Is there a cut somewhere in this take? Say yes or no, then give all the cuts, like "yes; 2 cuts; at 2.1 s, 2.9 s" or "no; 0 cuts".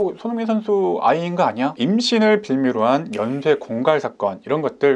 yes; 1 cut; at 1.8 s